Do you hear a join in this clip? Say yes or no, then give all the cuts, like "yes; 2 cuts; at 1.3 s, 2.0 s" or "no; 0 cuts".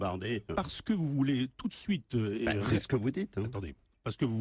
no; 0 cuts